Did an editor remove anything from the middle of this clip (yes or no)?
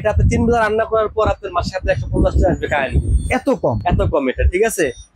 no